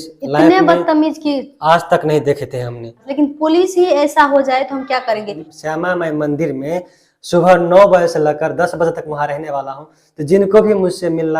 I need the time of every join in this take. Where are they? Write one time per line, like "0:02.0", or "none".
0:03.0
0:05.6